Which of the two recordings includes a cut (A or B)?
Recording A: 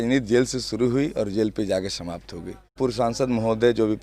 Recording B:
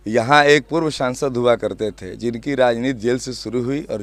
A